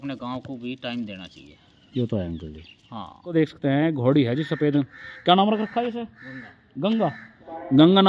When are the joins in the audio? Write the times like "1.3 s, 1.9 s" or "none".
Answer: 3.3 s